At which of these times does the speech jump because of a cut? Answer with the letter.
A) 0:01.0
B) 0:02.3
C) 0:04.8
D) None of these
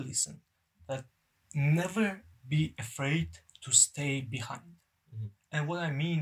A